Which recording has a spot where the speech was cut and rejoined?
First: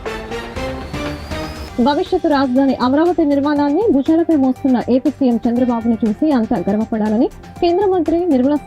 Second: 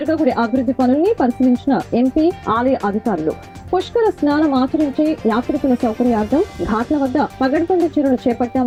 first; 1 cut; at 1.4 s

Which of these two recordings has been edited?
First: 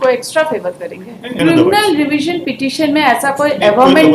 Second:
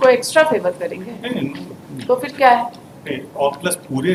first; 1 cut; at 1.4 s

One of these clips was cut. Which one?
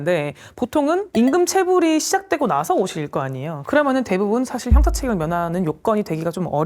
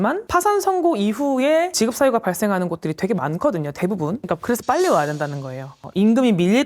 second; 1 cut; at 1.7 s

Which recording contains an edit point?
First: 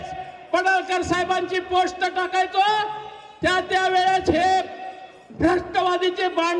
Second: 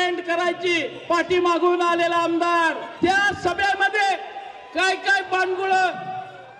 second; 2 cuts; at 0.9 s, 2.8 s

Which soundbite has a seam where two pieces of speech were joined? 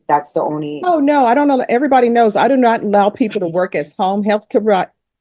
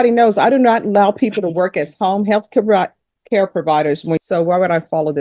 second; 1 cut; at 4.2 s

